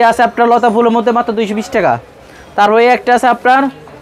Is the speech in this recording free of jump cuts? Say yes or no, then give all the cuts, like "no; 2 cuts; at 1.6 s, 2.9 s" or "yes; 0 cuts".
yes; 0 cuts